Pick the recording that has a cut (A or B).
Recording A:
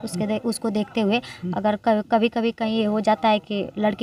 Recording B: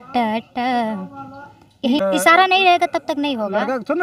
B